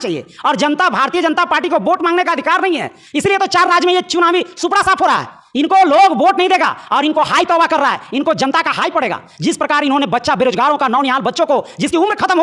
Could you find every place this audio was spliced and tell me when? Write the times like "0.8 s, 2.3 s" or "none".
none